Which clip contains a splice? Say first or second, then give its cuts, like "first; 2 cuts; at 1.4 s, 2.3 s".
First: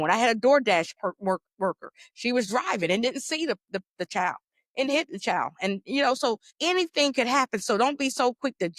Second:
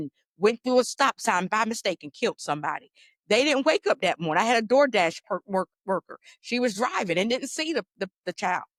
first; 1 cut; at 6.5 s